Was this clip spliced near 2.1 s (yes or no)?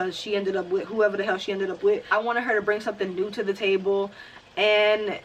yes